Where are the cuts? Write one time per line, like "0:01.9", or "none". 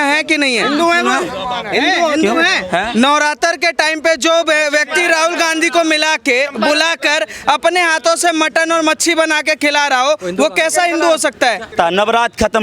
0:11.7